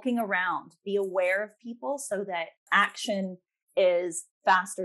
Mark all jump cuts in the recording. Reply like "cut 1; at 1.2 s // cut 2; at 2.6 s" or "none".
none